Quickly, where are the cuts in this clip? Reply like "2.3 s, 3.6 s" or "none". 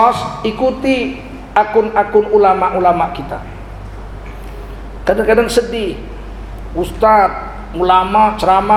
none